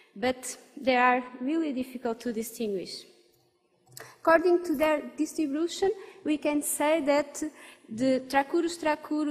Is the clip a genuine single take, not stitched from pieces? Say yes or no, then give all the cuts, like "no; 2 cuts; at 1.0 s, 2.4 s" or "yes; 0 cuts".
yes; 0 cuts